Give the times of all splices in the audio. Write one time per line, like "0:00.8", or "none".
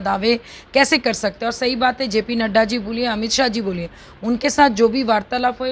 none